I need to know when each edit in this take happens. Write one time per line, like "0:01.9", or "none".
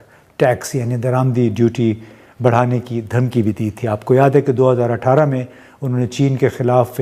none